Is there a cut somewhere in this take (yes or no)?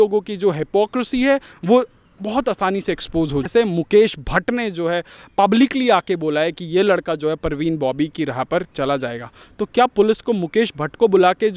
yes